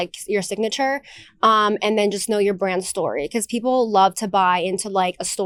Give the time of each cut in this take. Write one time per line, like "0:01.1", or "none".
none

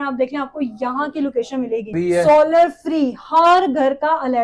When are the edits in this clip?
0:01.9

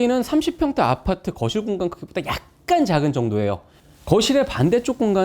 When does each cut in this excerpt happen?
0:03.7

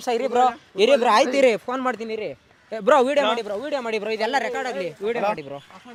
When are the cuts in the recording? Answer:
none

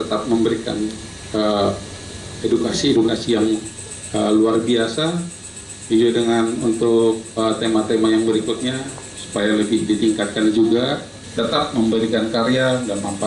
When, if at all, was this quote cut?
0:11.2

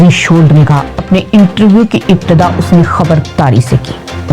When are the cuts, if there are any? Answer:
0:00.9

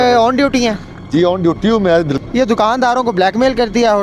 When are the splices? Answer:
0:02.1

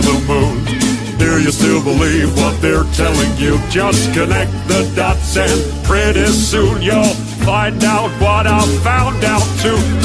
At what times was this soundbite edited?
none

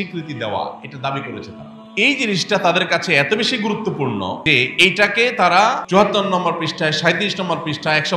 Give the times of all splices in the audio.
0:02.1
0:04.4
0:05.8

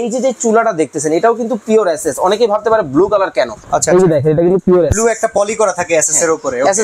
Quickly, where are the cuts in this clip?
none

